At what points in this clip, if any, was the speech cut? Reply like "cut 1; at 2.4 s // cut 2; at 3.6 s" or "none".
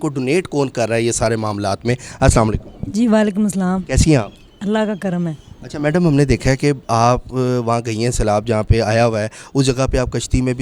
none